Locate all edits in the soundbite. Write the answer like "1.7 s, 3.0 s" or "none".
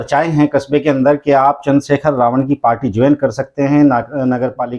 none